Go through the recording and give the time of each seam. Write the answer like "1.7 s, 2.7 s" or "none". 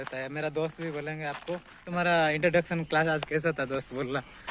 1.8 s